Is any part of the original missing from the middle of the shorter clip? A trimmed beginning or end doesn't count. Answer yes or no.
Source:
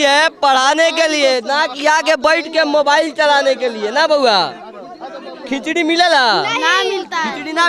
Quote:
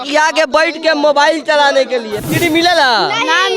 yes